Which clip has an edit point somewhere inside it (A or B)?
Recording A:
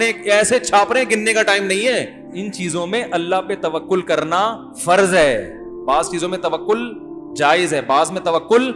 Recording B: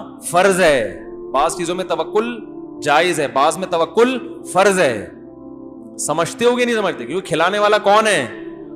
A